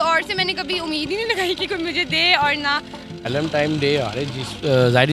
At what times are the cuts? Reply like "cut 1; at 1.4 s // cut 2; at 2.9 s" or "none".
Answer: cut 1; at 3.3 s

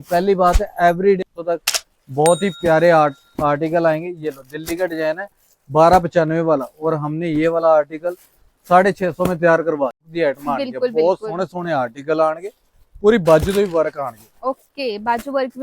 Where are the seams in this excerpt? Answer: cut 1; at 1.2 s // cut 2; at 10.1 s

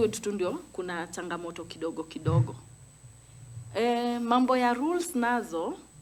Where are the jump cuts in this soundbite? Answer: none

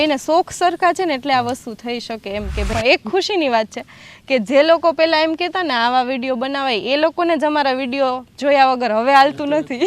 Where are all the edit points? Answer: cut 1; at 2.7 s

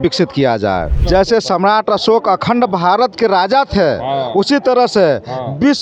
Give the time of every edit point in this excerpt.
cut 1; at 1.0 s

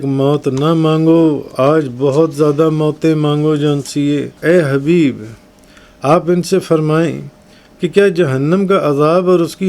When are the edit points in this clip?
cut 1; at 4.4 s

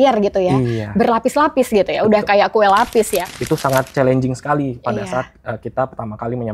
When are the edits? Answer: cut 1; at 3.2 s

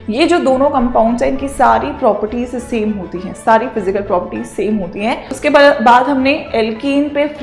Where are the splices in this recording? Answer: cut 1; at 5.3 s

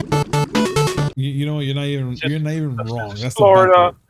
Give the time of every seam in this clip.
cut 1; at 1.1 s

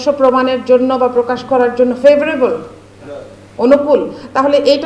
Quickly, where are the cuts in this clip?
none

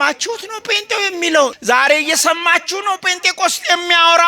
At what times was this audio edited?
cut 1; at 1.6 s

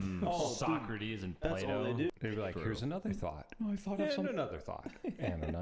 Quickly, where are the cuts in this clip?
cut 1; at 2.1 s

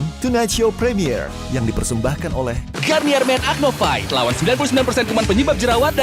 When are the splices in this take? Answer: cut 1; at 5.1 s

